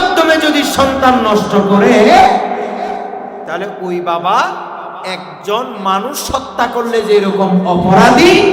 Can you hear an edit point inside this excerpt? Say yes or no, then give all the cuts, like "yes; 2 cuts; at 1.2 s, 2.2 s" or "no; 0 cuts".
no; 0 cuts